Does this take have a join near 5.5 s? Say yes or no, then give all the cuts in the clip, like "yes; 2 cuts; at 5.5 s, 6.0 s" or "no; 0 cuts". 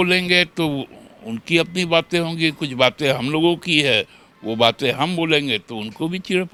no; 0 cuts